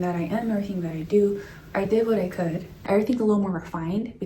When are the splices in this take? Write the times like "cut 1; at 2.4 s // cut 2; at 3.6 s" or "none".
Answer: cut 1; at 2.7 s